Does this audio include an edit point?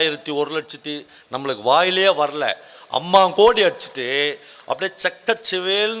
no; 0 cuts

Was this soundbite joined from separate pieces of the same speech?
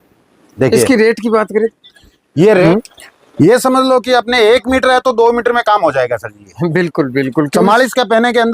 yes; 1 cut; at 2.6 s

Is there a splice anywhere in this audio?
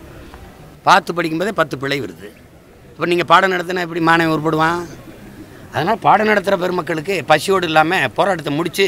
no; 0 cuts

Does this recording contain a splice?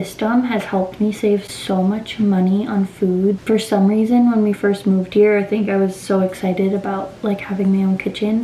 no; 0 cuts

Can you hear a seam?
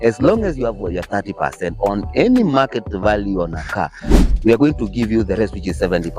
yes; 1 cut; at 4.3 s

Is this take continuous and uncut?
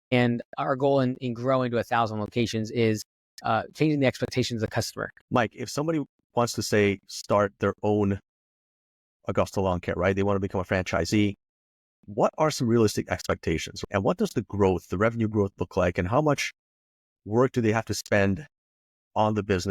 no; 2 cuts; at 5.1 s, 13.7 s

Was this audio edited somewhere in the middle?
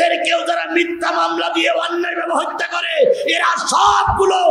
no; 0 cuts

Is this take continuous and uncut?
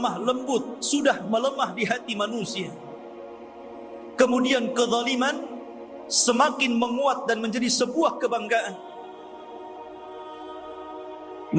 yes; 0 cuts

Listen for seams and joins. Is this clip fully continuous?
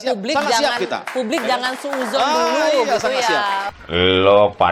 no; 1 cut; at 3.7 s

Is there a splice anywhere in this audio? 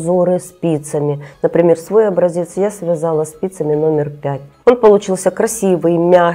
no; 0 cuts

